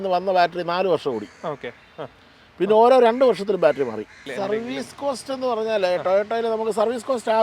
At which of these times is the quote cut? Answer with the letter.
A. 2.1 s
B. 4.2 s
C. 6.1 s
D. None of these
B